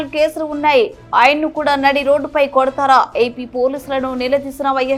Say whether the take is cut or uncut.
uncut